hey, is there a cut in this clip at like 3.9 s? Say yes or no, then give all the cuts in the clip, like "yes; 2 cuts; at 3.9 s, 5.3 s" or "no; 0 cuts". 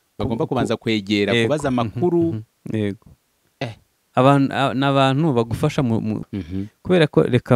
no; 1 cut; at 6.2 s